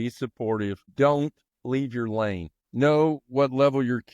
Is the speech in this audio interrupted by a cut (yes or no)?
yes